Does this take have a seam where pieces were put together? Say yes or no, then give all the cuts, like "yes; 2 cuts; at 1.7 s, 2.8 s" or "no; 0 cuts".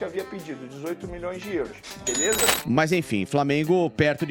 yes; 1 cut; at 2.6 s